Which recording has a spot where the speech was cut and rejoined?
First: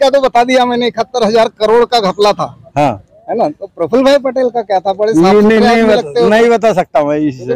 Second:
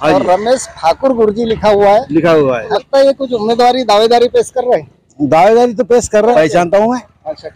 second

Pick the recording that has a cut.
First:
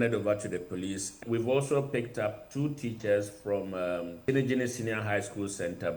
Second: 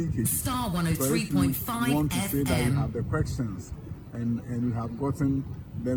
first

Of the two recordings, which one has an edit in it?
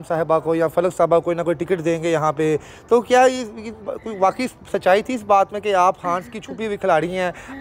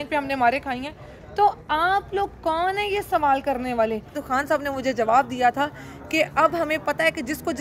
second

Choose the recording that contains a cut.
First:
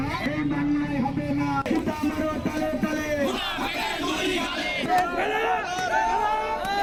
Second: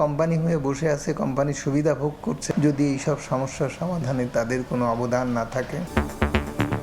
second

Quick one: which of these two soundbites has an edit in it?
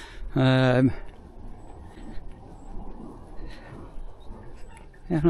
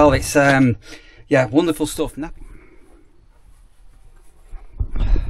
second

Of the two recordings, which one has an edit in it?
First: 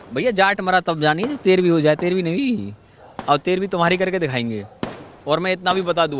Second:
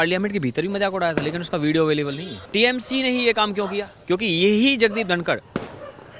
second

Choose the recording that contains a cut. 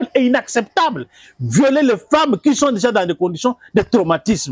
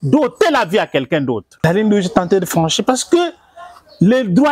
second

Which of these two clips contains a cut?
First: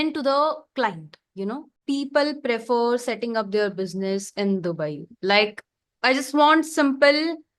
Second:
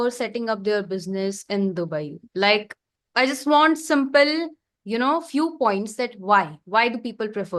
first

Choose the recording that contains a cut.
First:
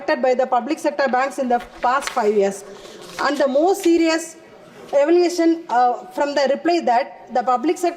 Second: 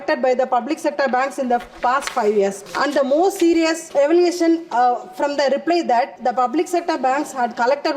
second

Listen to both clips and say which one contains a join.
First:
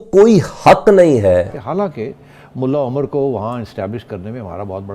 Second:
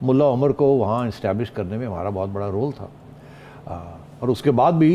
first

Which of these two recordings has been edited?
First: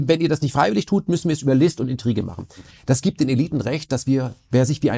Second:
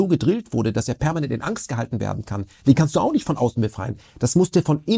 first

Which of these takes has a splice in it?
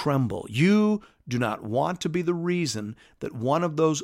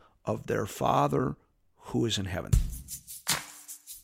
second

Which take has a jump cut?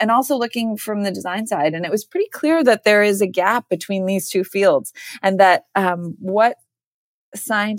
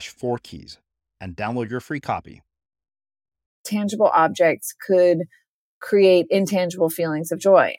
second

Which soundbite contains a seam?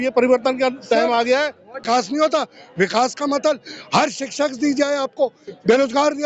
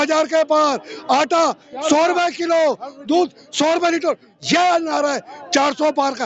first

